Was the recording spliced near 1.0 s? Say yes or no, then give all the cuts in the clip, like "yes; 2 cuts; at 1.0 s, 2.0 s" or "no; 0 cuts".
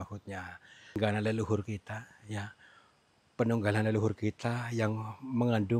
yes; 1 cut; at 1.0 s